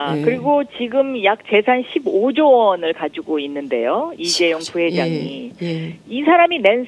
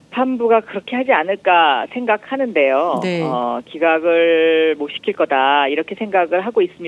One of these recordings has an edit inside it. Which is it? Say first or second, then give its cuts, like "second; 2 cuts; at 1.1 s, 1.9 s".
first; 1 cut; at 5.1 s